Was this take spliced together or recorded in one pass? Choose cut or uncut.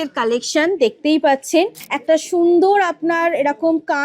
cut